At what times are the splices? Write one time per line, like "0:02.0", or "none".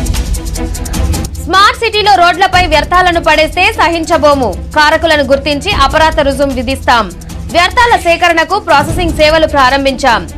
0:01.2

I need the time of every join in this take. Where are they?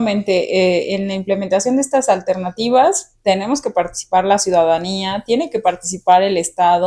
none

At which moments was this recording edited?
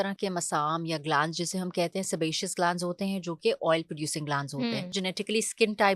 0:05.0

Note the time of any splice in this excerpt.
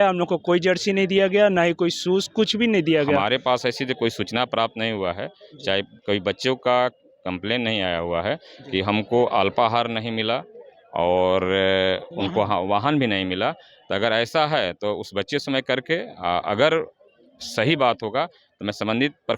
0:03.2

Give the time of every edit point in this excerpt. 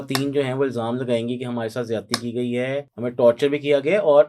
0:02.9

